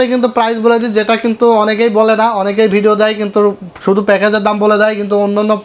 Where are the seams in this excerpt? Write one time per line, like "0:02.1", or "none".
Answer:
none